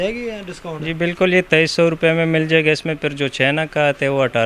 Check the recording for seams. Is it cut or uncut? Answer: uncut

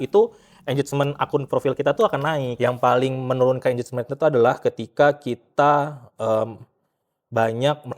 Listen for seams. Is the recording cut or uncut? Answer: cut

